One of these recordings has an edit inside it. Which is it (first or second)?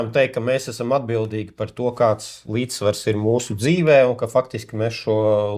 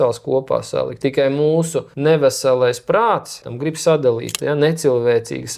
second